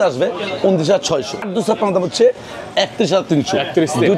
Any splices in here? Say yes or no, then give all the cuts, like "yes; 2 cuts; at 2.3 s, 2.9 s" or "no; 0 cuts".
yes; 1 cut; at 1.4 s